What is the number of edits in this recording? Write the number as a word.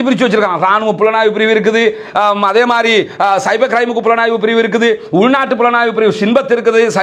zero